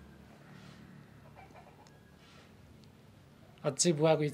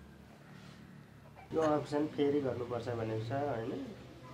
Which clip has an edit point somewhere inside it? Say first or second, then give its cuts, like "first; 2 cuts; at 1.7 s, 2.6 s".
second; 1 cut; at 1.5 s